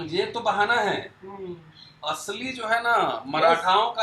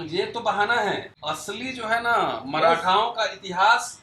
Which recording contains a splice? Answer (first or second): second